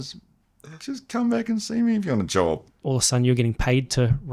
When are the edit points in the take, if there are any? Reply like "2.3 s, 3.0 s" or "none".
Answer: 2.7 s